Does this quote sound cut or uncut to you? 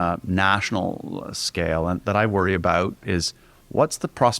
cut